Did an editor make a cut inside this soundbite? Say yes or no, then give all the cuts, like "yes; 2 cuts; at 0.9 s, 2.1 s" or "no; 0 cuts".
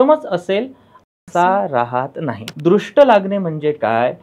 yes; 1 cut; at 2.4 s